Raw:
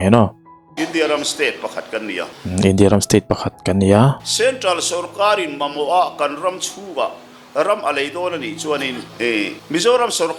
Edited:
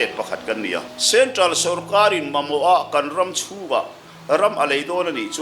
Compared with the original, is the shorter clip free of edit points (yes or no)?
no